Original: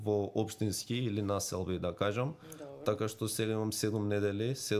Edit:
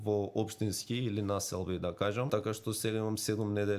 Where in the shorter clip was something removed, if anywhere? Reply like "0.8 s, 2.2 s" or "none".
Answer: 2.3 s